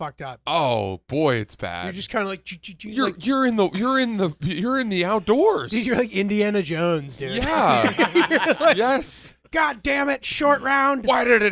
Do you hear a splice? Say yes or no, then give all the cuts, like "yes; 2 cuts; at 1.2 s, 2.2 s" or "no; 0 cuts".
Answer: no; 0 cuts